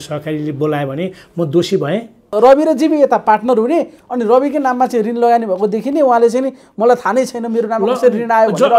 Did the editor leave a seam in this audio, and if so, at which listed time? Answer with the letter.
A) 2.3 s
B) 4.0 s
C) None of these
A